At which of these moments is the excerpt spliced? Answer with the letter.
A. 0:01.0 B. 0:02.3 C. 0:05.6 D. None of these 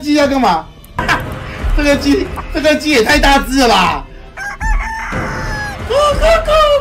A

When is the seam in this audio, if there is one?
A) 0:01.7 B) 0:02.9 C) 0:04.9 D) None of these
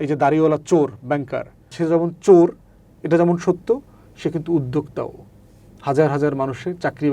A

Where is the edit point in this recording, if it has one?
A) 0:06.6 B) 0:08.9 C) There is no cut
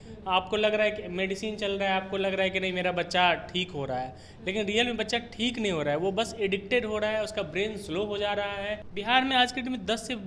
B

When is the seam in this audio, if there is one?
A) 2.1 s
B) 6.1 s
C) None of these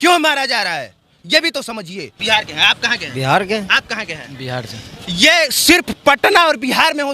A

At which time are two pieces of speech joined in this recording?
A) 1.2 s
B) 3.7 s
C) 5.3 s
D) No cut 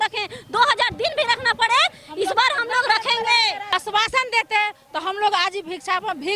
B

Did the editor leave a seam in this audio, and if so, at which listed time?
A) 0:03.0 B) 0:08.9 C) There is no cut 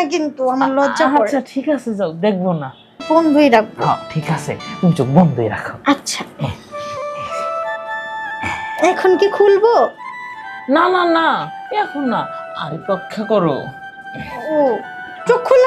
A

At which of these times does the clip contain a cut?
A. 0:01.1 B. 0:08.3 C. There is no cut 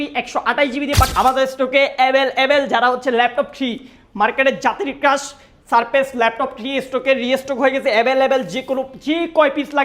A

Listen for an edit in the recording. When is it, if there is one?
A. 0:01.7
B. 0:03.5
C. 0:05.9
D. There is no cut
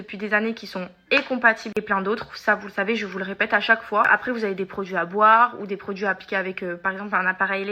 A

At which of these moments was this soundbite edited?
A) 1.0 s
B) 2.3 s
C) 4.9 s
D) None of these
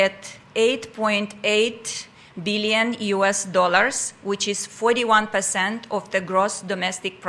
D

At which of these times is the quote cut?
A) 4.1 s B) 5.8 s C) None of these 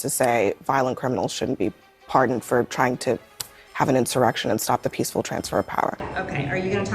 B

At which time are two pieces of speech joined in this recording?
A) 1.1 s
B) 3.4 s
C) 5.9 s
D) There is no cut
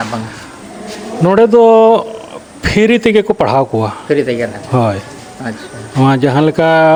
D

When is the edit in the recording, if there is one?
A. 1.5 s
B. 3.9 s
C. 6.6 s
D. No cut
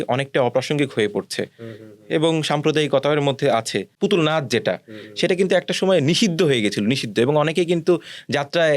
B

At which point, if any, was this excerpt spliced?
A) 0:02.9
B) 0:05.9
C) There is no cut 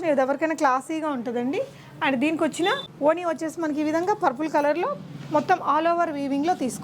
A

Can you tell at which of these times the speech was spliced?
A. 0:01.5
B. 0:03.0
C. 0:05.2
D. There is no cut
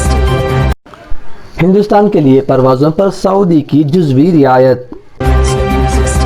C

